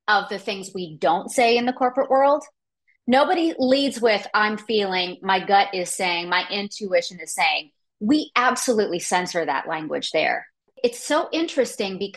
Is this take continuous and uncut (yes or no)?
no